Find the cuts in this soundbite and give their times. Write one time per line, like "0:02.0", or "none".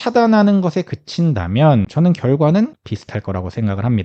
0:01.9
0:02.9